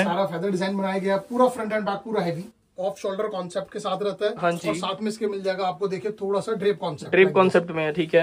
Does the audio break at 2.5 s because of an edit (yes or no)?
yes